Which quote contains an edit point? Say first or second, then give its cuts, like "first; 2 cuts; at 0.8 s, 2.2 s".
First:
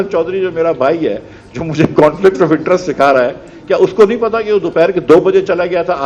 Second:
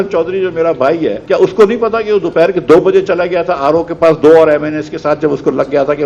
second; 1 cut; at 1.2 s